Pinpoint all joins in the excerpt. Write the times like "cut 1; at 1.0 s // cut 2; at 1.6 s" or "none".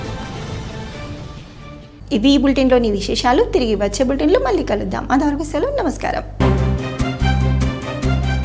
none